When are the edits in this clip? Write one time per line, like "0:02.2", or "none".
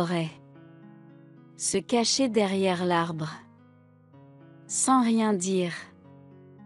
none